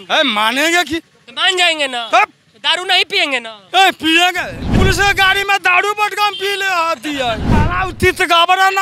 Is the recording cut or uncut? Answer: cut